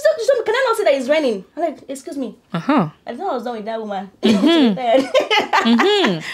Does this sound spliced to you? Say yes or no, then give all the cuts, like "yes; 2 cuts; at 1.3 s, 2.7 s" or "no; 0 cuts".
no; 0 cuts